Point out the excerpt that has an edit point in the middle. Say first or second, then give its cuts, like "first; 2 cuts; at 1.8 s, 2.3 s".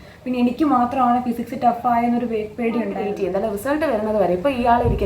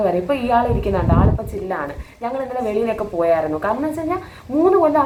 first; 1 cut; at 3.1 s